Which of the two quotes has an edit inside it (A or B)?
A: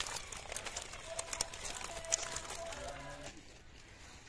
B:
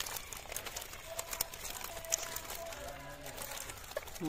A